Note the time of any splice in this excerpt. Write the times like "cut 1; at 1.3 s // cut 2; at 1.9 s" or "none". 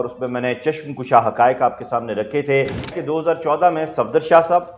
cut 1; at 2.9 s